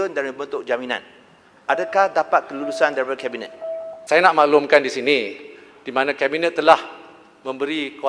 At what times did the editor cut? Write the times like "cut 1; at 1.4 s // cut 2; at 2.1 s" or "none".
cut 1; at 3.9 s